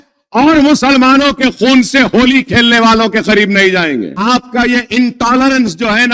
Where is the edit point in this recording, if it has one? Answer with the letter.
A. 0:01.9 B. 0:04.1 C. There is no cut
B